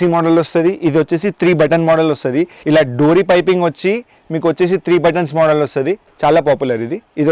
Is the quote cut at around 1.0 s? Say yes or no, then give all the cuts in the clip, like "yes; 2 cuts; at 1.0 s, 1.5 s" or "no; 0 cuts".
no; 2 cuts; at 2.6 s, 6.0 s